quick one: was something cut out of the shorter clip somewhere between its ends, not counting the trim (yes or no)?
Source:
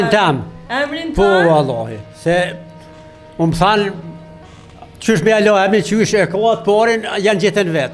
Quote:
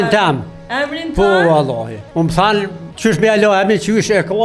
yes